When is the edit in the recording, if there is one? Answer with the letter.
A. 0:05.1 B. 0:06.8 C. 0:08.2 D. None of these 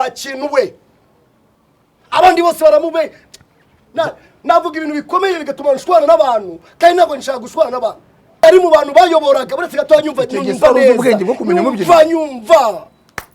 C